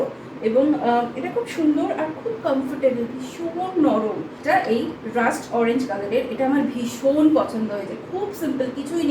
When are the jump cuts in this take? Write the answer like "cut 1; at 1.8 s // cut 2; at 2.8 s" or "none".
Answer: cut 1; at 4.4 s